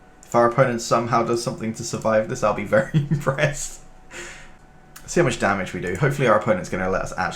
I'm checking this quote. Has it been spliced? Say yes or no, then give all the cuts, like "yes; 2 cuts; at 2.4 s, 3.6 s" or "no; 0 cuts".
yes; 1 cut; at 4.6 s